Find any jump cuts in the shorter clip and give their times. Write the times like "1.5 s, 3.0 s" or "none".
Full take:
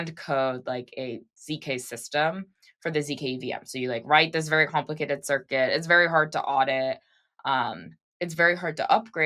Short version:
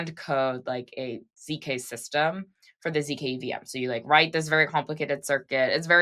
none